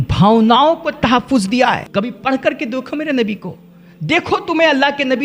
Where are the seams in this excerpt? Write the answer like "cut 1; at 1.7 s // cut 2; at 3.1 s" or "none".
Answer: cut 1; at 1.8 s